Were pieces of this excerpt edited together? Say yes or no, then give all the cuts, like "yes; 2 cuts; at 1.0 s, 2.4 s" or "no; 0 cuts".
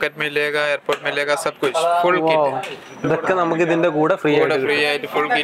no; 0 cuts